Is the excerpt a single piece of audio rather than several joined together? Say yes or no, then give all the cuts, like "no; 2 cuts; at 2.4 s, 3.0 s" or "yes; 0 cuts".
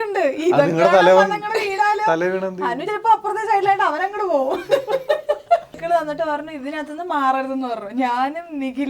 no; 1 cut; at 5.8 s